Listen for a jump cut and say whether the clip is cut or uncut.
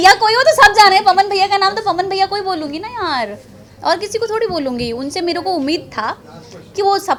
uncut